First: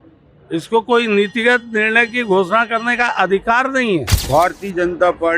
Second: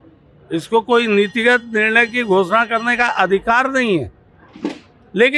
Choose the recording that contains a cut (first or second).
first